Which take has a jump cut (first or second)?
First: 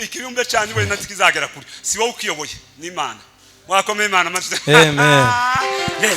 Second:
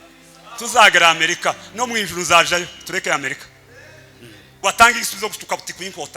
second